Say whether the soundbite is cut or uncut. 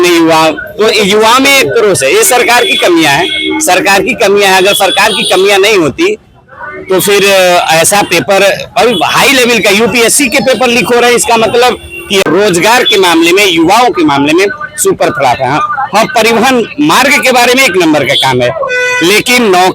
cut